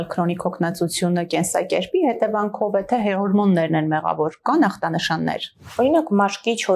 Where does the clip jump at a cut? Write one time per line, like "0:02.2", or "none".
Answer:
0:05.6

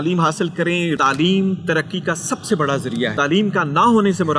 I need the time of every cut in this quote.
0:01.0
0:03.1

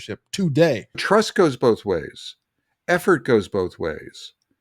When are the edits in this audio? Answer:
0:01.0

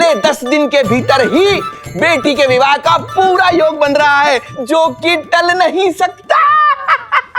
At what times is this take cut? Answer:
0:04.5

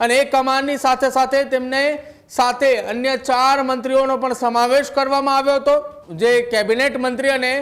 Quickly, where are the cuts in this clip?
0:06.0

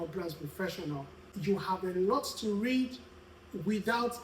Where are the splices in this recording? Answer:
0:01.3

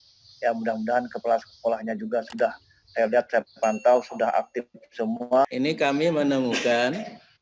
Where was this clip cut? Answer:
0:05.4

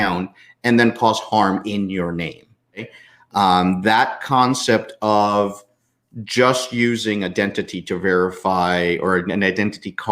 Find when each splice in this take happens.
0:02.9

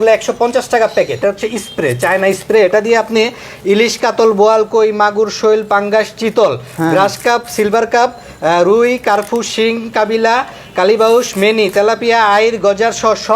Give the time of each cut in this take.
0:01.2

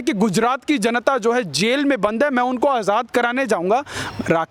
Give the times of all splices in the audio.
none

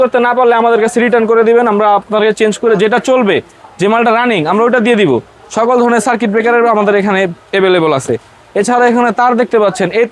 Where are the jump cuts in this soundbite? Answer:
none

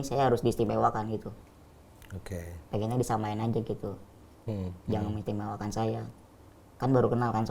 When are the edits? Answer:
none

